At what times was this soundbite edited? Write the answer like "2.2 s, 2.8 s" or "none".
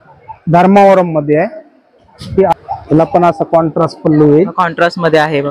2.5 s